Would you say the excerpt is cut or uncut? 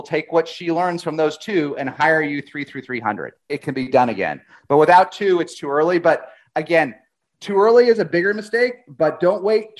uncut